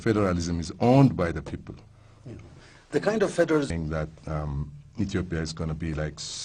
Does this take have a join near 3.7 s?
no; 0 cuts

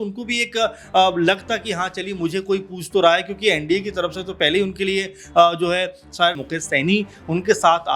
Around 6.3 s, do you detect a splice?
yes; 1 cut; at 6.3 s

